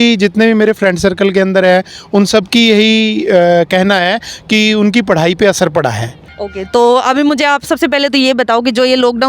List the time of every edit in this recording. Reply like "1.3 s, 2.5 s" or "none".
6.1 s

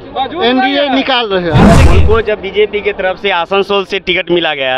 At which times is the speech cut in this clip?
1.8 s

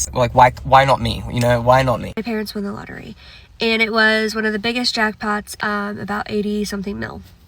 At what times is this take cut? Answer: 2.1 s, 5.5 s

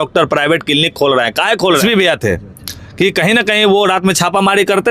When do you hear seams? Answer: 1.8 s

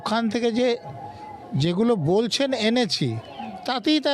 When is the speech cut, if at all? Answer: none

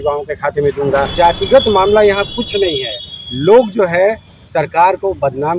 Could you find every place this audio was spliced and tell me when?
1.1 s

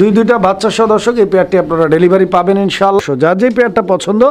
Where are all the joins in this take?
3.0 s

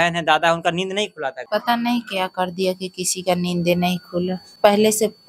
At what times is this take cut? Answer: 1.4 s, 4.4 s

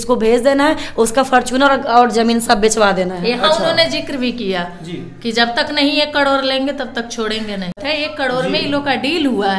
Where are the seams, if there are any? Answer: 7.8 s

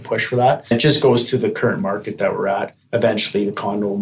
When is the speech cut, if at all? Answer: 0.7 s, 2.8 s

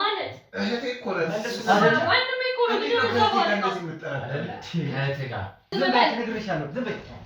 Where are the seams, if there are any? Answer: 5.7 s

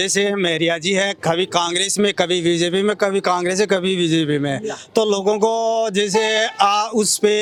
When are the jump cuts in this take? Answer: none

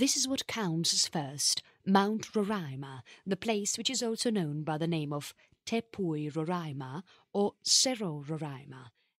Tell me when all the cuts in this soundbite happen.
5.4 s

